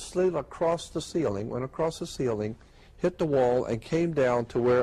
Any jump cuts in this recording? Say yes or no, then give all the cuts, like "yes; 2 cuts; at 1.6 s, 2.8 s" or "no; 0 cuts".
no; 0 cuts